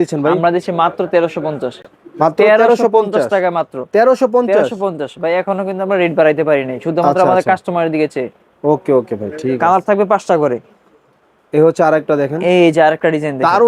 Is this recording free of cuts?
yes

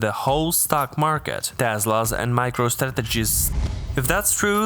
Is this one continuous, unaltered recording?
no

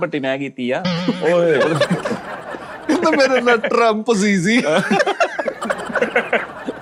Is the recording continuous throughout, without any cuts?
yes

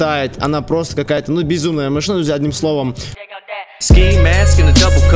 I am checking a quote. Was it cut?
no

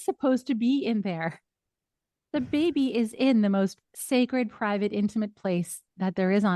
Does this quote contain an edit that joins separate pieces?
yes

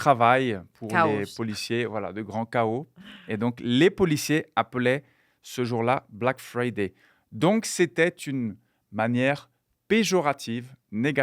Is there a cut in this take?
no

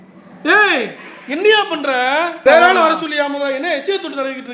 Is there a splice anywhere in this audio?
yes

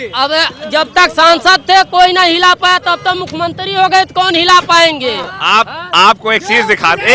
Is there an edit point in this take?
no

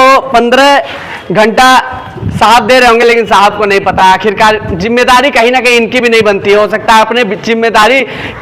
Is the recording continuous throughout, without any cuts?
yes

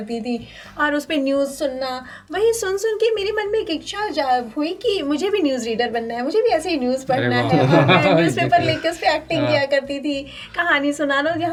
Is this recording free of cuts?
yes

